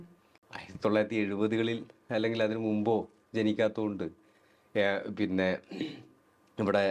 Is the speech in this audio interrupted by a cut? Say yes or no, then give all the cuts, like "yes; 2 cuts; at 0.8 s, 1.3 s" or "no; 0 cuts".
no; 0 cuts